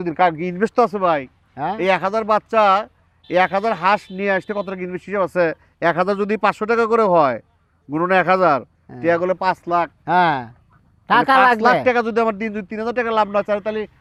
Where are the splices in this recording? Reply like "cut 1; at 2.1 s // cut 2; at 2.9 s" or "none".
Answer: none